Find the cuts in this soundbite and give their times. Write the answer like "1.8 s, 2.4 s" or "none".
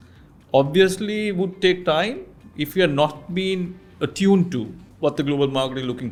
none